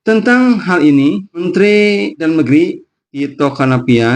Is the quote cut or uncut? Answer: cut